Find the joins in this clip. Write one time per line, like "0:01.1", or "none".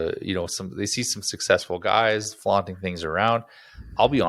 none

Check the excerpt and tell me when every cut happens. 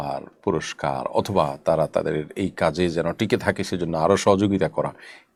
none

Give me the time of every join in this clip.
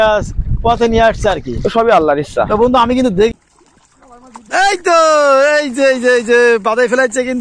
0:03.3

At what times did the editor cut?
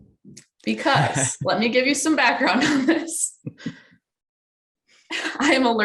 none

